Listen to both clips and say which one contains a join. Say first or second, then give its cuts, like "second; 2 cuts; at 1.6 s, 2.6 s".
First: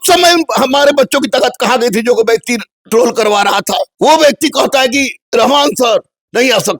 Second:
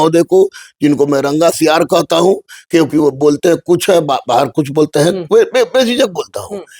first; 3 cuts; at 2.8 s, 3.9 s, 5.2 s